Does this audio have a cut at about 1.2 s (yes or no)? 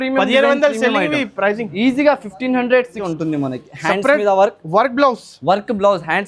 no